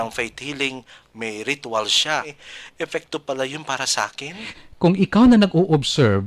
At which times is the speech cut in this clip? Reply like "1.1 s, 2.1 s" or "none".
2.4 s, 4.5 s